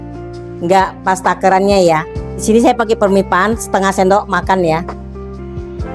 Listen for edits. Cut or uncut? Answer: cut